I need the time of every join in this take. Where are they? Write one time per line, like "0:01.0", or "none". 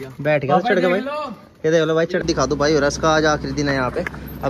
0:02.2